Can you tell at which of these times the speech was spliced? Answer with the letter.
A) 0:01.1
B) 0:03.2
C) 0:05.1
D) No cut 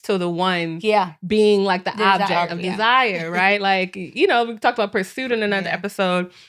D